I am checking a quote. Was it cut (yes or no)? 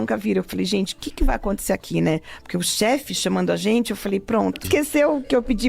yes